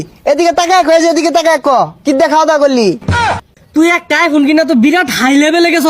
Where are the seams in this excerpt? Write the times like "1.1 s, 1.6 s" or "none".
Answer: 3.1 s